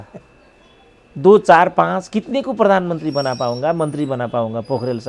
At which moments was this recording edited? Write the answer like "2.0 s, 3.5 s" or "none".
none